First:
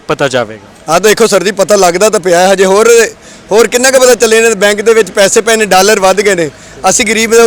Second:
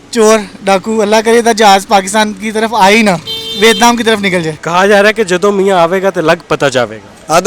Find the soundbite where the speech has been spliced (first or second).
second